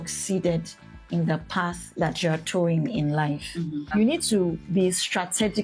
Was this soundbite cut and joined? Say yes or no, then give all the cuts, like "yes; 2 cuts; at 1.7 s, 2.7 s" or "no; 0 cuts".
yes; 1 cut; at 3.9 s